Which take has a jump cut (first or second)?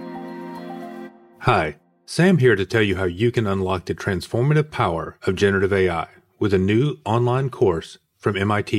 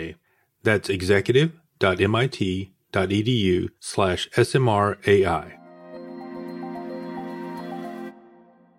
first